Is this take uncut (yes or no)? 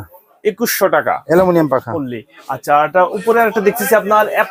yes